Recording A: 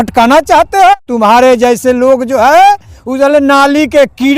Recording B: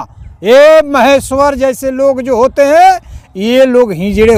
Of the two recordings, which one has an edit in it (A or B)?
A